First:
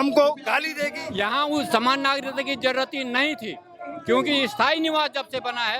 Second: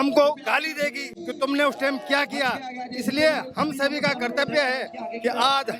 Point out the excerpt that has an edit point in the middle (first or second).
first